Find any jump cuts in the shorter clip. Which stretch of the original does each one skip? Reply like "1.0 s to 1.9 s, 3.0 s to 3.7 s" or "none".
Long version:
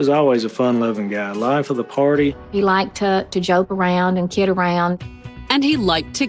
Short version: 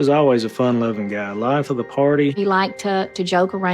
2.4 s to 2.5 s